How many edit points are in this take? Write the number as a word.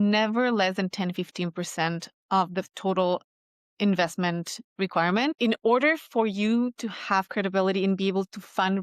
one